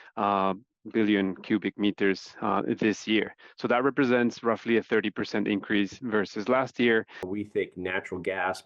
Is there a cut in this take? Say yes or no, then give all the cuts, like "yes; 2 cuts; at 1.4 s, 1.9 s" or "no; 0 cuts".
yes; 1 cut; at 7.2 s